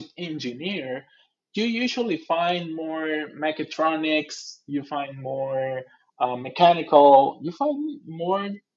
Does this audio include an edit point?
no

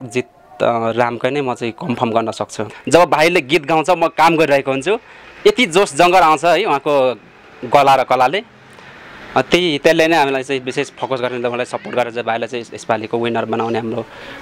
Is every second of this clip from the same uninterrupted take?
no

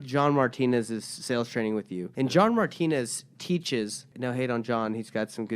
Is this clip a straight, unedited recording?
no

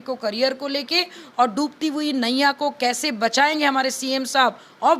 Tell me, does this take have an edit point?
no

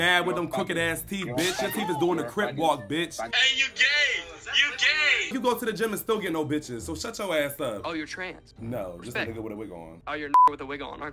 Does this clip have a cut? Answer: yes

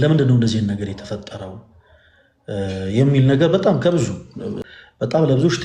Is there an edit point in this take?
yes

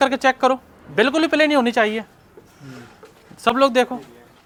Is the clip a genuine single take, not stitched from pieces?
yes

